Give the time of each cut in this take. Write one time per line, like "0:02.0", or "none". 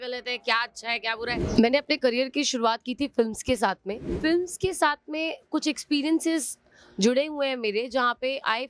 0:01.4
0:04.1